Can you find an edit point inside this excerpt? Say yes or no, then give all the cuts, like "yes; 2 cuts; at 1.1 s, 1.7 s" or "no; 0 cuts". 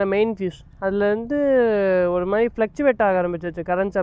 no; 0 cuts